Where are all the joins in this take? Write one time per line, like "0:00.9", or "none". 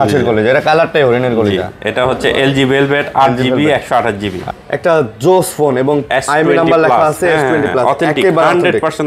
0:04.4